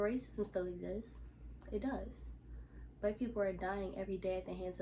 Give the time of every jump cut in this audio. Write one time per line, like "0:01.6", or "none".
none